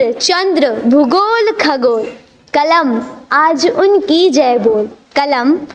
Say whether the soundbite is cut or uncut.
uncut